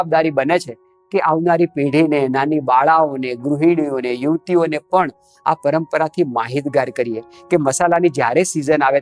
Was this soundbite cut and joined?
no; 0 cuts

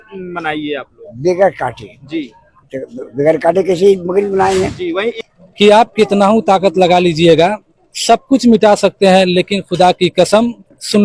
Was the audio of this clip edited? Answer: yes; 1 cut; at 5.2 s

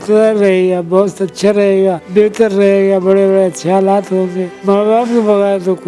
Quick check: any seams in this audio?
yes; 2 cuts; at 2.0 s, 4.5 s

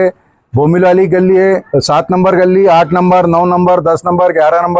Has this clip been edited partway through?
yes; 1 cut; at 1.7 s

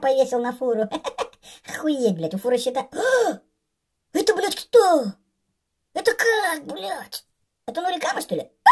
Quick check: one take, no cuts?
yes; 0 cuts

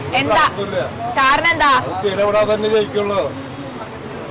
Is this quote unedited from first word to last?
yes; 0 cuts

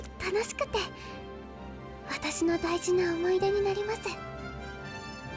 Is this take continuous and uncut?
yes; 0 cuts

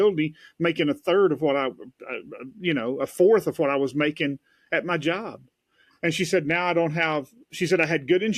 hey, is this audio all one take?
yes; 0 cuts

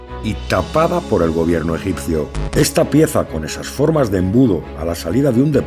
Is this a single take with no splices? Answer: no; 1 cut; at 2.4 s

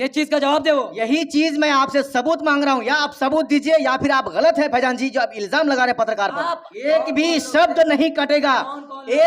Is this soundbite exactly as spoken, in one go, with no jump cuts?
no; 1 cut; at 6.7 s

